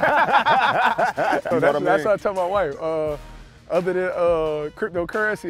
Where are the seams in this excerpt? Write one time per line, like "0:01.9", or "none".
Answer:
0:01.5